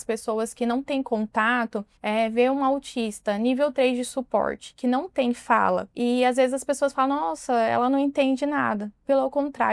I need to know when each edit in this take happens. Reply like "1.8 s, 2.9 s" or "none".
1.9 s, 5.9 s